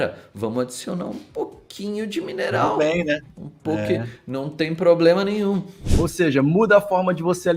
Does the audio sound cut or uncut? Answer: cut